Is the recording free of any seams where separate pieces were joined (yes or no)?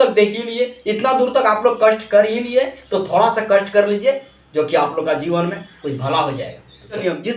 yes